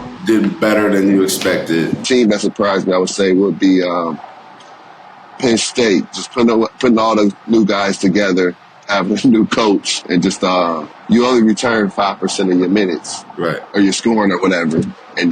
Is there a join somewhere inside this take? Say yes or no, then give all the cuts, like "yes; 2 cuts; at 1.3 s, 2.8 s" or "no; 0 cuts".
yes; 2 cuts; at 2.0 s, 10.9 s